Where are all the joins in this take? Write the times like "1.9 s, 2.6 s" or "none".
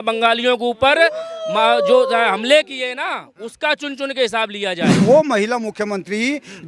5.0 s